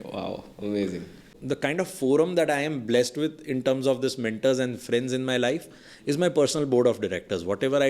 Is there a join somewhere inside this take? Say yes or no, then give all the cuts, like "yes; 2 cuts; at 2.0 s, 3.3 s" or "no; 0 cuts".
yes; 1 cut; at 1.3 s